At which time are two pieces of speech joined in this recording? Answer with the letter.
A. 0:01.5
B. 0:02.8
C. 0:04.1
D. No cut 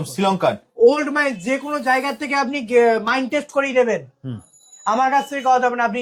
D